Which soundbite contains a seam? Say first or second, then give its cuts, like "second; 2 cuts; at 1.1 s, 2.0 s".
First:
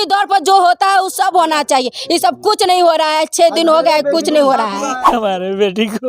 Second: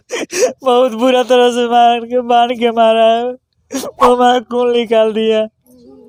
first; 1 cut; at 5.0 s